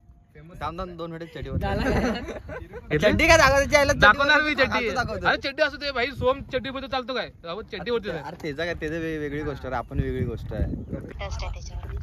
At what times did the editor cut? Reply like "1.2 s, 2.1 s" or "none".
11.1 s